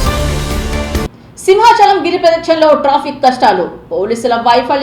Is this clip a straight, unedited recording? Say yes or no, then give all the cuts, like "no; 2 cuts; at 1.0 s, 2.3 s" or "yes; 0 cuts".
no; 1 cut; at 1.0 s